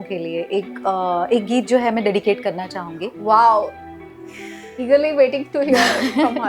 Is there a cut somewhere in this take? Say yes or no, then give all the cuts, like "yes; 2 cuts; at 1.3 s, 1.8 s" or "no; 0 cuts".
no; 0 cuts